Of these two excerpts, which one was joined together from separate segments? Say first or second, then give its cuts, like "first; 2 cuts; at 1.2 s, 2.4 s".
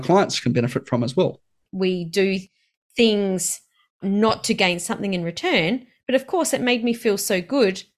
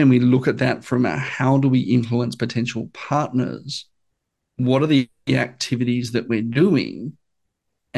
first; 1 cut; at 1.6 s